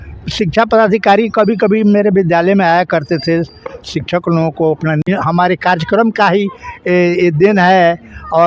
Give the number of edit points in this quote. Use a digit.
1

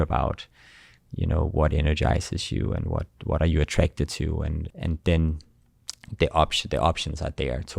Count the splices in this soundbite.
1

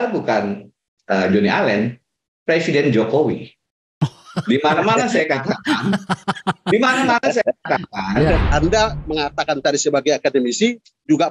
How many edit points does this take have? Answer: 1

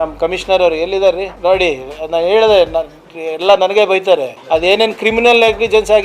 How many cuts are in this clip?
2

